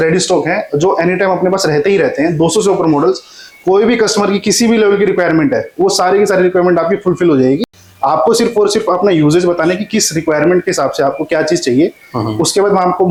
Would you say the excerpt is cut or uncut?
uncut